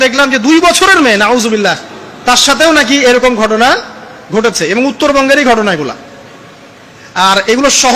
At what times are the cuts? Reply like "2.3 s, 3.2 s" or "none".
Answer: none